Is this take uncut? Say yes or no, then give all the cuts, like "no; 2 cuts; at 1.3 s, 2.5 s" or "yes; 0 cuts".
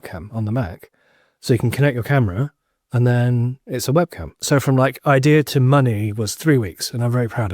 no; 1 cut; at 4.4 s